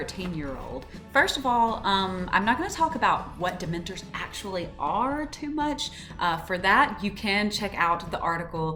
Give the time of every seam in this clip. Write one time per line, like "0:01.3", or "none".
none